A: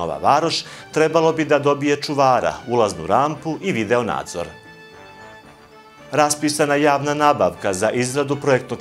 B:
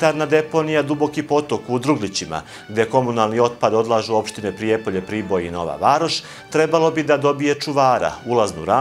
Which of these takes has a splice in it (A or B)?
A